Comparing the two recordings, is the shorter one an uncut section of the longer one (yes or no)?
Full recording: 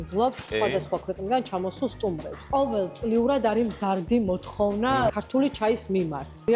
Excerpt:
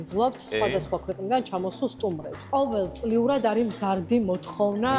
yes